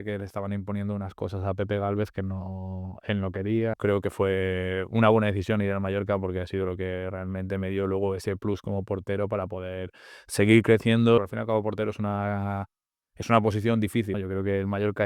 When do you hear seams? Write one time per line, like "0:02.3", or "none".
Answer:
0:03.8
0:11.2
0:14.2